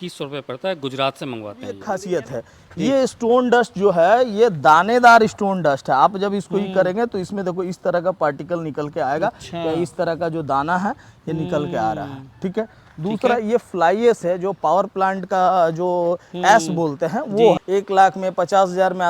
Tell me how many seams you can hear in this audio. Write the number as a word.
two